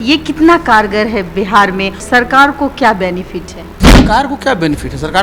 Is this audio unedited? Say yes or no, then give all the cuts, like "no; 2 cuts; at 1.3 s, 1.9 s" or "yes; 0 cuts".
no; 2 cuts; at 2.0 s, 4.0 s